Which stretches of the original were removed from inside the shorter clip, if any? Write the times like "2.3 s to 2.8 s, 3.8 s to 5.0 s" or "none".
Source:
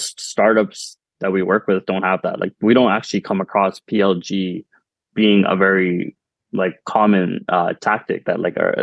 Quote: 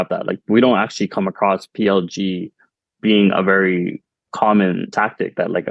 6.4 s to 6.8 s, 7.4 s to 7.8 s